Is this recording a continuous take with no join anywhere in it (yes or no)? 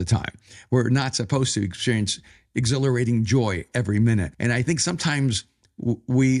no